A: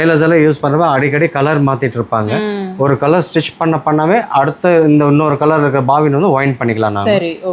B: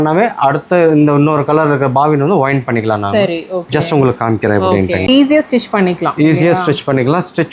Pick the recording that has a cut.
B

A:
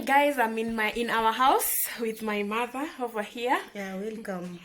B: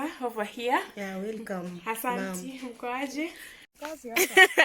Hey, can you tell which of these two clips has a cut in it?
B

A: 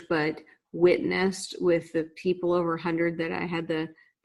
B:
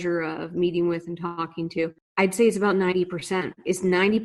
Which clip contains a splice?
B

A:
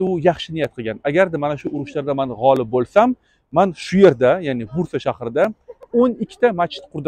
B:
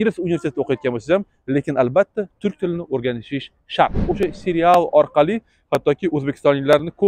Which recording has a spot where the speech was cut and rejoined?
B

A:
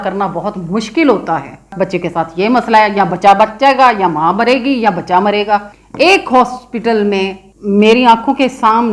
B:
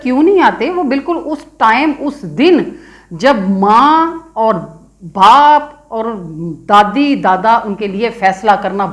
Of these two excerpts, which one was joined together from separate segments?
A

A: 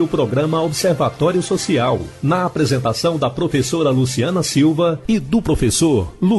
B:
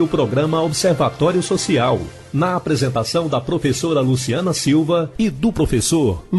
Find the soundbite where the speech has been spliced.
A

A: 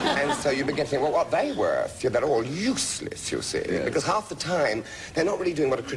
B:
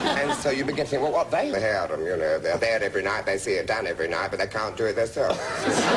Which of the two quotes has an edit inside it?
A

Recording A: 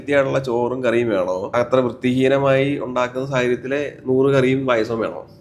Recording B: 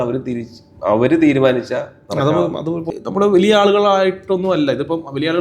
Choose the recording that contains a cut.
B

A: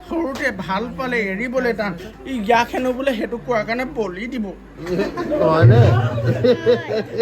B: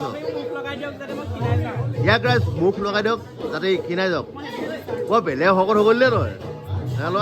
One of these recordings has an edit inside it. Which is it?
A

